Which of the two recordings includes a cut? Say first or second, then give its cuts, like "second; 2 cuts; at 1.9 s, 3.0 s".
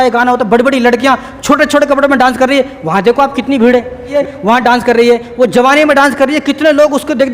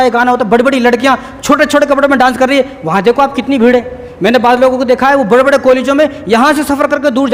first; 1 cut; at 4.1 s